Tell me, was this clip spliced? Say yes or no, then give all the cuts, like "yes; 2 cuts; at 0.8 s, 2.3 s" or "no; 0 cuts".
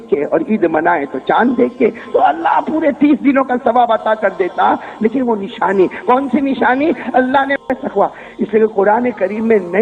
yes; 1 cut; at 7.6 s